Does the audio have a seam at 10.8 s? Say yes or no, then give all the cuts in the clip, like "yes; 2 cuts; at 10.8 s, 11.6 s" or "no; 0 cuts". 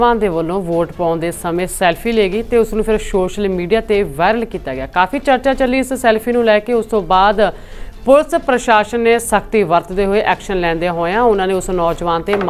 no; 0 cuts